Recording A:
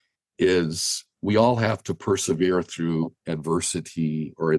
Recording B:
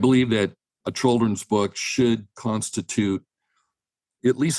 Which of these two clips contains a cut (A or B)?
A